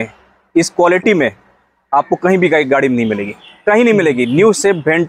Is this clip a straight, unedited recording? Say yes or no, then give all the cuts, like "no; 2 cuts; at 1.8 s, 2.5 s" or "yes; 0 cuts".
yes; 0 cuts